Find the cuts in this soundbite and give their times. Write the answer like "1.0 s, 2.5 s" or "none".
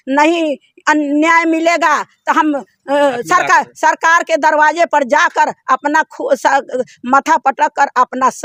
none